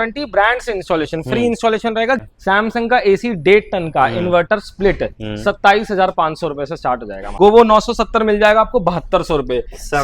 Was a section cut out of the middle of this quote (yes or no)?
yes